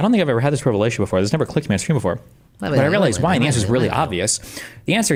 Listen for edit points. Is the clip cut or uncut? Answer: uncut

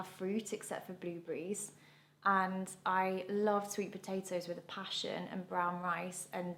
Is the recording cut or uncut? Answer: uncut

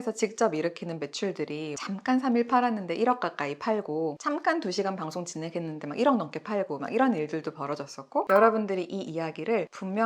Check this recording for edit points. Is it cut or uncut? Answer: cut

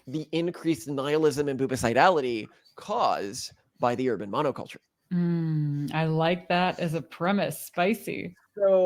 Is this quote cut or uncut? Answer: uncut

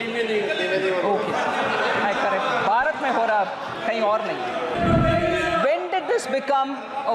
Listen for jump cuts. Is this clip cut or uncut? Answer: cut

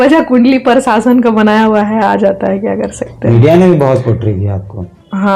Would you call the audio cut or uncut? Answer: uncut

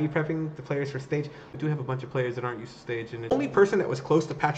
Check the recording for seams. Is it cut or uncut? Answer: cut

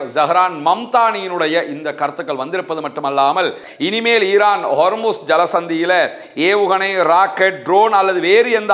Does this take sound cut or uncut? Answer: cut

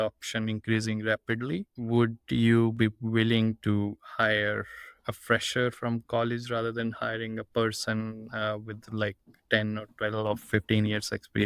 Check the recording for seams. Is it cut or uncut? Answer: cut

